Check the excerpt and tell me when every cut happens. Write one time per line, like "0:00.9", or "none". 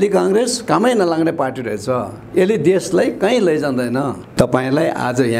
0:04.2